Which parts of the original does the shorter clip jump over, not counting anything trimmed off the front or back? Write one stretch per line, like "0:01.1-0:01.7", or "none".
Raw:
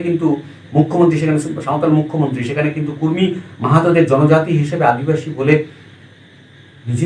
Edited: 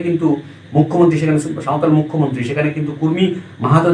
none